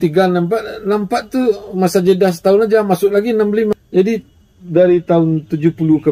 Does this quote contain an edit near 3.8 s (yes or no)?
yes